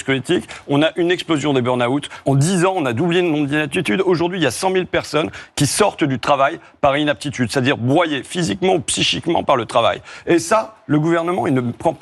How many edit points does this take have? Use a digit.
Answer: 1